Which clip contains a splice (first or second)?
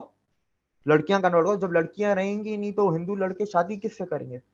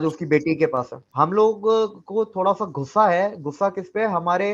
second